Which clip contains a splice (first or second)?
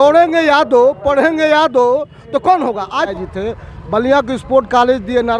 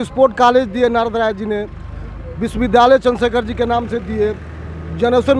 first